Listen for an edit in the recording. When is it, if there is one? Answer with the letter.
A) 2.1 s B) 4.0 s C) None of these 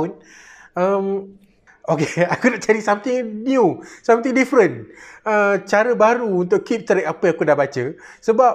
A